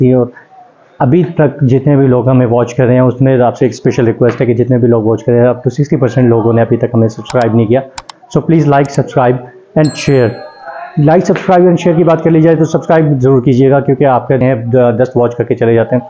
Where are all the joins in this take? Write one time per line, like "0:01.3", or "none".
0:14.4